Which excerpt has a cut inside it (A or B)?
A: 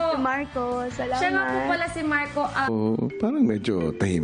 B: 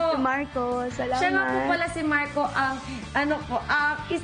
B